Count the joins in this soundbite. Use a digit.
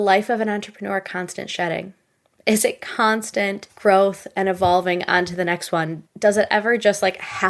1